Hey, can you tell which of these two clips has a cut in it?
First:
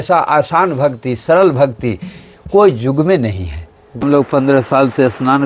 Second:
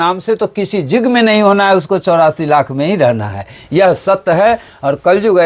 first; 1 cut; at 4.0 s

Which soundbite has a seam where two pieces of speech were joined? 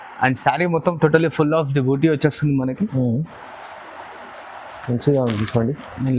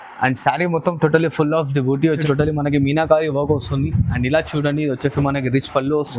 second; 1 cut; at 2.2 s

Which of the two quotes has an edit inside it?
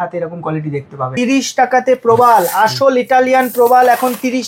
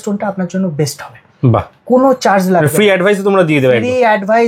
first; 1 cut; at 1.1 s

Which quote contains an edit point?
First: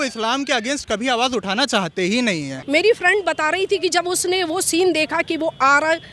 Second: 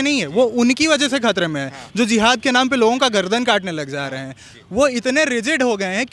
first; 1 cut; at 2.5 s

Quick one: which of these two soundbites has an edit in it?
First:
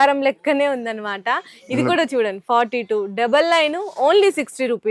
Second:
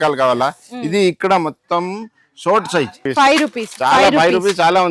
second; 1 cut; at 3.0 s

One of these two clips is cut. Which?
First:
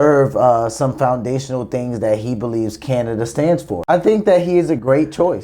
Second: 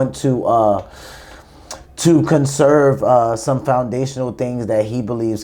first; 1 cut; at 3.7 s

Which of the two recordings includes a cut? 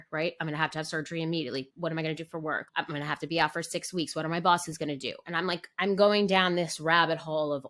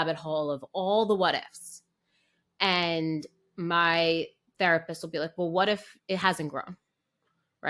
first; 2 cuts; at 1.7 s, 2.6 s

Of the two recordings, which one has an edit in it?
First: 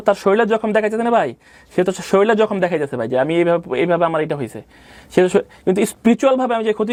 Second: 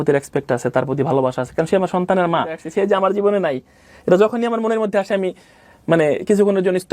second; 1 cut; at 2.6 s

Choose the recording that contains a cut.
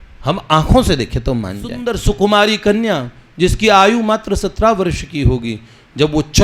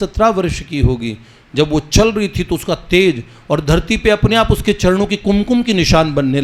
first; 1 cut; at 1.9 s

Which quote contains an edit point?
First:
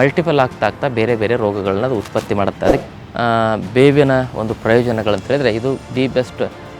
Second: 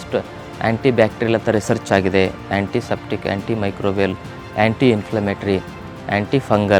first; 1 cut; at 2.8 s

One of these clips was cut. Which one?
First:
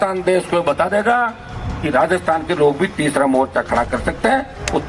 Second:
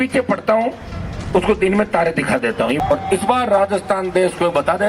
second; 1 cut; at 2.8 s

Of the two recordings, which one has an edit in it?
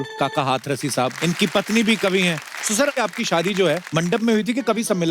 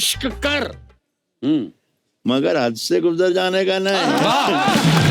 first; 3 cuts; at 1.1 s, 2.9 s, 3.8 s

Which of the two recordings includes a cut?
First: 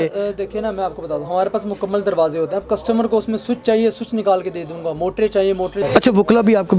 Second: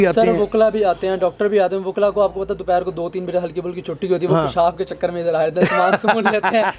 first; 1 cut; at 5.8 s

